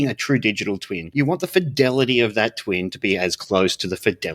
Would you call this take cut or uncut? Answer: cut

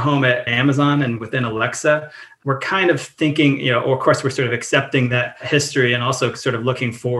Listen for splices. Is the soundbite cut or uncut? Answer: uncut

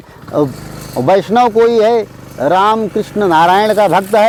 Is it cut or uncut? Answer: uncut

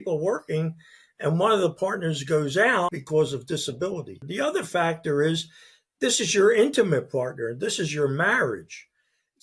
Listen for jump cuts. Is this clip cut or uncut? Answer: cut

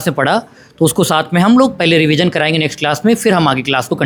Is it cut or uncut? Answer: uncut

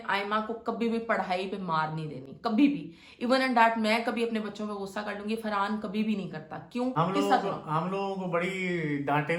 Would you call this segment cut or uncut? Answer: uncut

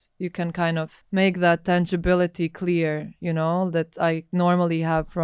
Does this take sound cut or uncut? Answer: cut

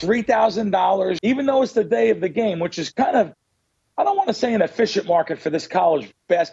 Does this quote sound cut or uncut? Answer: cut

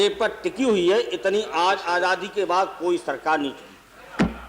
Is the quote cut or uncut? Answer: uncut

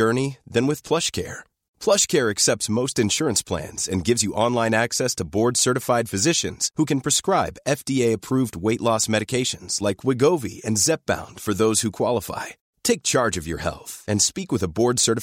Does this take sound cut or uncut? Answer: uncut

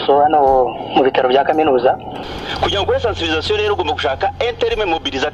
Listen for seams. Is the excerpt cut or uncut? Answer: cut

